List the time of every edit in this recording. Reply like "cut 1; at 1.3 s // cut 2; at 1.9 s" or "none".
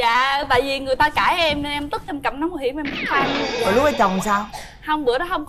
none